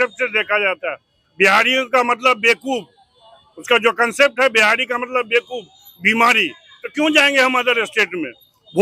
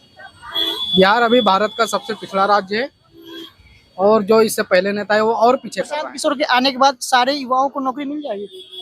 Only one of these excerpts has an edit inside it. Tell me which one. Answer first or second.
second